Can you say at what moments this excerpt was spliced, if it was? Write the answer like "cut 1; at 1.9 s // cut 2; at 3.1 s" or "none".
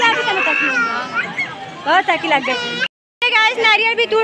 cut 1; at 2.7 s